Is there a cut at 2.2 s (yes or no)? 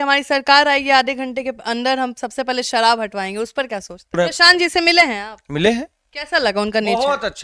no